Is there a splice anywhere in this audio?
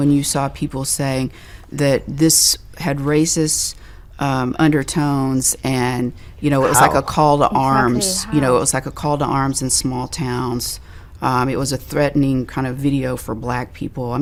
no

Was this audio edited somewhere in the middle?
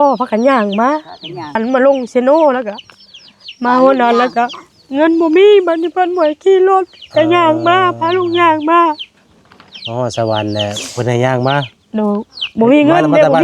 yes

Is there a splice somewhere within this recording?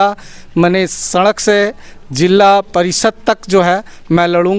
no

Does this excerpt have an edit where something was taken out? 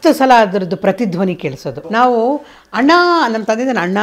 yes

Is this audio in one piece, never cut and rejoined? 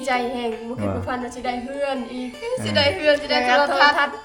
yes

